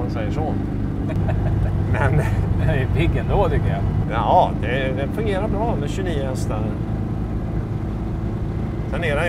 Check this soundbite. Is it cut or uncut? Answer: uncut